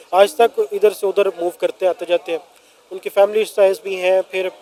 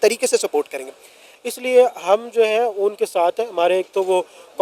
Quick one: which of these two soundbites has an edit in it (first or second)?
second